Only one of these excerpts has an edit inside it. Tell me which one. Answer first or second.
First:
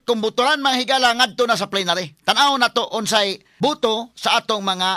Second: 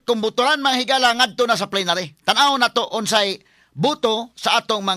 first